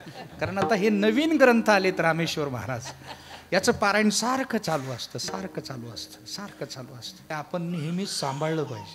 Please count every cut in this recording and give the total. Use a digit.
1